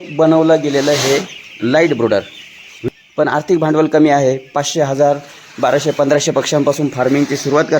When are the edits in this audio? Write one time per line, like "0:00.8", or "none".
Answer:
0:02.7